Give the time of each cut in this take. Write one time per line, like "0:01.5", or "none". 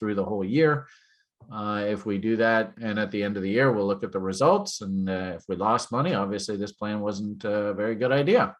none

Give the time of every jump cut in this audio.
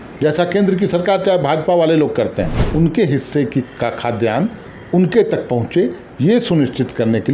0:02.6

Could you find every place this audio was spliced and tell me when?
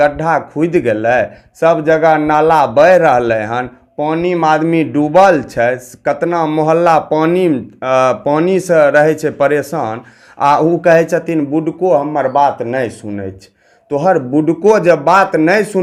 none

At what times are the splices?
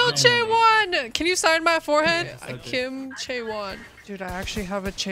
0:02.4
0:03.9

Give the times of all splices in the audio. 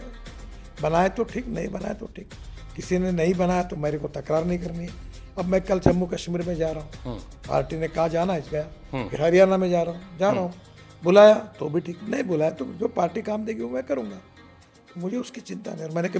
none

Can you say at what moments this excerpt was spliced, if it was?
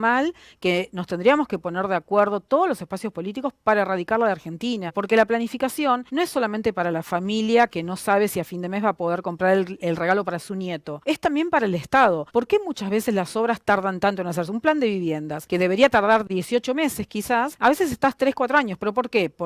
0:05.0
0:06.0
0:10.9
0:12.2
0:15.3
0:17.5

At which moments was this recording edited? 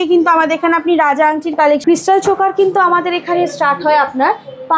0:01.8

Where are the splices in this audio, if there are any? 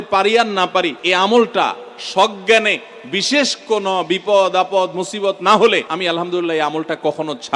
0:01.0
0:05.9

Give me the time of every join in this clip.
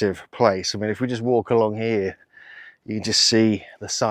none

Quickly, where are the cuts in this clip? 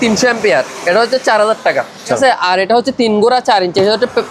0:02.2

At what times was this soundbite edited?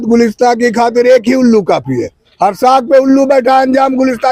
none

